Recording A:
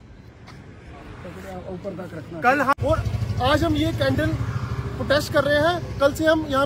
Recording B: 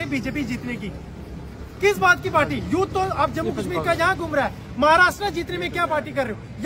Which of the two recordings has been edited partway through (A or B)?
A